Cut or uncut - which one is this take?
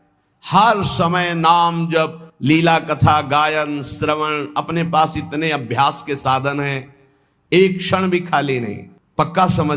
uncut